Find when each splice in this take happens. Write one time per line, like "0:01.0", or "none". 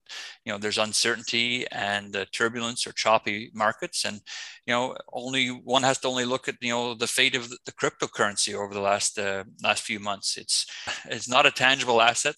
0:11.0